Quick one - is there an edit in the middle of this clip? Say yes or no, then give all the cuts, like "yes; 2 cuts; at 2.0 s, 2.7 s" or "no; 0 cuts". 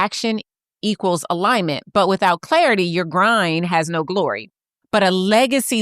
yes; 1 cut; at 4.4 s